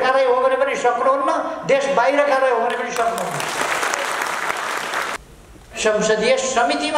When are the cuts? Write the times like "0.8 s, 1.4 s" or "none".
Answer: 5.1 s